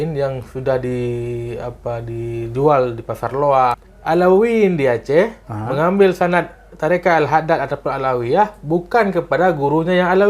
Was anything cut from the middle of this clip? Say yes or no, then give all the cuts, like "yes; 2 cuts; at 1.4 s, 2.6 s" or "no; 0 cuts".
yes; 1 cut; at 3.9 s